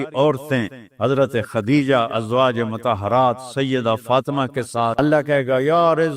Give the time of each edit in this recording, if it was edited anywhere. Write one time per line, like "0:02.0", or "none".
0:04.9